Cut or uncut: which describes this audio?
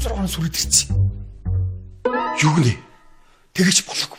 cut